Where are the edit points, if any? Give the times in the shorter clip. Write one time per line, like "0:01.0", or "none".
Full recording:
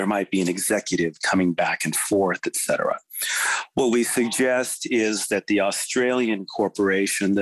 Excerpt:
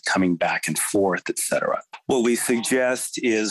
0:01.9